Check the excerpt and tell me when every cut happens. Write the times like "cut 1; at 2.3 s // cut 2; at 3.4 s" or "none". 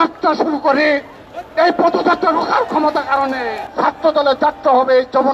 cut 1; at 3.6 s